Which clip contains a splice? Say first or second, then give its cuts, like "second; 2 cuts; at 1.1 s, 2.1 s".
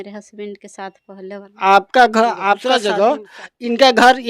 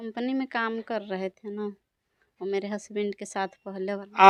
first; 1 cut; at 2.6 s